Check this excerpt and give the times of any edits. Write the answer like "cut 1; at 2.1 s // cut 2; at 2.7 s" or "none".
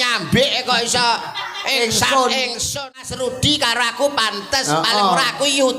cut 1; at 2.6 s